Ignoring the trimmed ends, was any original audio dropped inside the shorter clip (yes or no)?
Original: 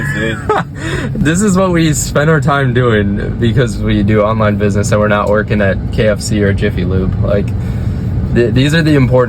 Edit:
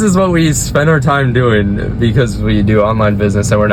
no